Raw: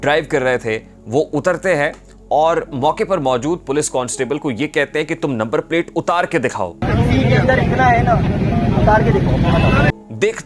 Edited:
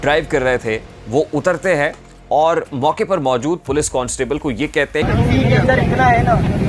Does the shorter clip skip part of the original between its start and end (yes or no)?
yes